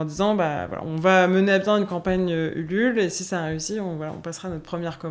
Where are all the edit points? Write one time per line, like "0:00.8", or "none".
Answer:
none